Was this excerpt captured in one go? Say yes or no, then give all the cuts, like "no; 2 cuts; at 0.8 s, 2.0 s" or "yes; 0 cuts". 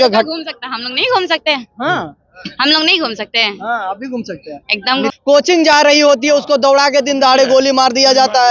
no; 1 cut; at 5.1 s